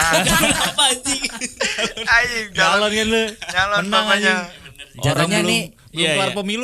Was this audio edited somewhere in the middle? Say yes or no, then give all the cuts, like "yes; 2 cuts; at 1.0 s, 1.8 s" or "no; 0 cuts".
no; 0 cuts